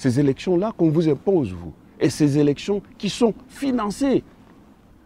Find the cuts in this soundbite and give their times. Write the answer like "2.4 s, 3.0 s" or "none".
none